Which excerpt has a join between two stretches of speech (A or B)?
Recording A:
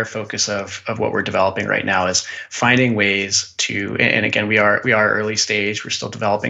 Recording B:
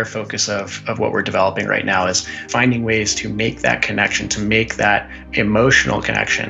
B